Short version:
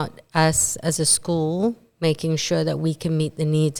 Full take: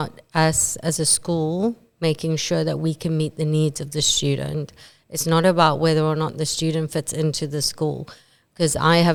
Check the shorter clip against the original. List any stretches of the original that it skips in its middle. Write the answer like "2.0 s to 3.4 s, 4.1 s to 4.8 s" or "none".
none